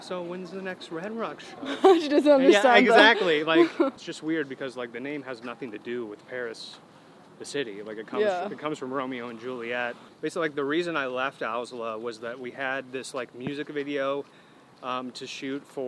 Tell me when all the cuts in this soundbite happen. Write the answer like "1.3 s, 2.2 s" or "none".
4.1 s, 10.1 s